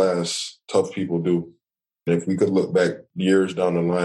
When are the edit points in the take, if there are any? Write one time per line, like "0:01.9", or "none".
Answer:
0:02.0
0:03.1